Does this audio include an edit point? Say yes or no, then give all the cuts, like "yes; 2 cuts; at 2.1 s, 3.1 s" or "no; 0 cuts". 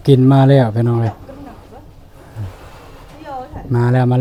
no; 0 cuts